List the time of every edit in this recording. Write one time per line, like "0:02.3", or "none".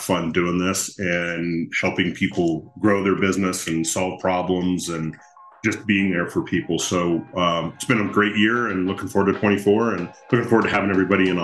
none